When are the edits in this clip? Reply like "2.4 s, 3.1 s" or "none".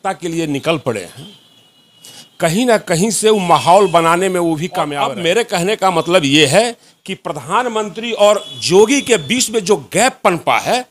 4.9 s